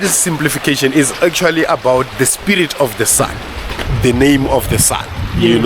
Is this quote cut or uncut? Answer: cut